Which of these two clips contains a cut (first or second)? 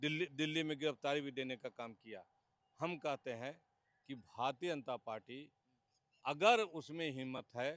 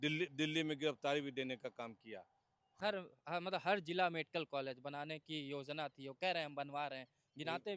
second